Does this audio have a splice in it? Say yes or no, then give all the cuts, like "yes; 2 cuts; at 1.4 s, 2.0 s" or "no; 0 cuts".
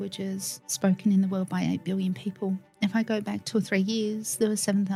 no; 0 cuts